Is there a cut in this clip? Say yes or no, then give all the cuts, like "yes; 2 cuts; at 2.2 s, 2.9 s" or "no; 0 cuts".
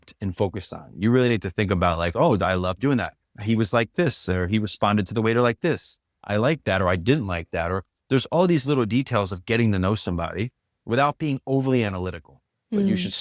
no; 0 cuts